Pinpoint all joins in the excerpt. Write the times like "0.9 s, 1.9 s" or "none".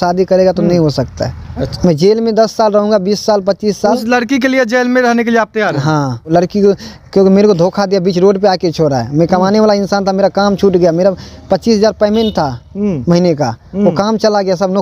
1.7 s, 6.3 s